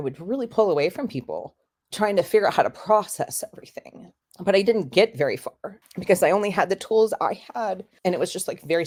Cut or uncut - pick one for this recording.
uncut